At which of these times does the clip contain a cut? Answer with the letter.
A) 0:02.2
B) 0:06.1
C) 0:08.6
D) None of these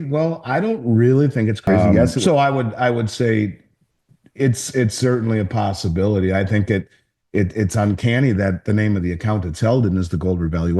A